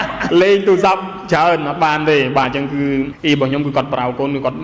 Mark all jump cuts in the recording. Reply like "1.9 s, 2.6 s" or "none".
3.1 s